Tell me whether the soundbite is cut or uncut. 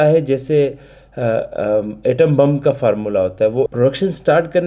cut